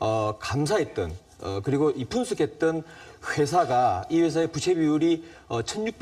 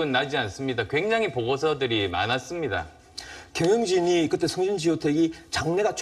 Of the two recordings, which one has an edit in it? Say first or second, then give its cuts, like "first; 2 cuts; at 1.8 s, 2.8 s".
first; 1 cut; at 4.4 s